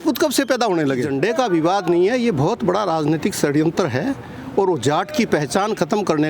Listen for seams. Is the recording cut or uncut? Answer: cut